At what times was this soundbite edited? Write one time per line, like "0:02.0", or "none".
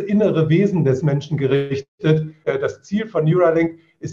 0:02.3